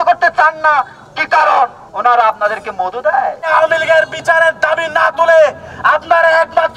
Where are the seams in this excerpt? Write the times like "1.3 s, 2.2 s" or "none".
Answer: 1.8 s, 3.5 s